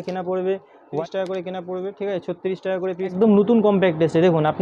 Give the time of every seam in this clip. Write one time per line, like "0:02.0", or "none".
0:01.0
0:03.1

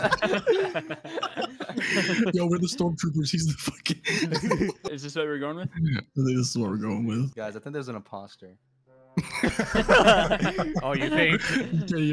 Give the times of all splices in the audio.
0:07.3

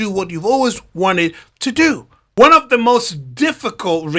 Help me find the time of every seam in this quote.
0:02.2

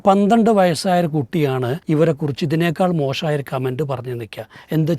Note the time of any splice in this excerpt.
0:01.8

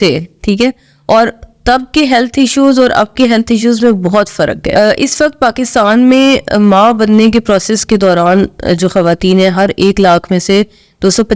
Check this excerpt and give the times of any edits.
0:04.7

